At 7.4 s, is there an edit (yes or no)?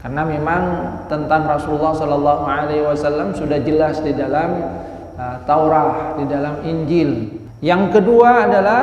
yes